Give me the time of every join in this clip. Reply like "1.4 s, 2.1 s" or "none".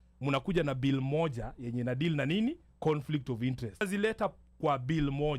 3.8 s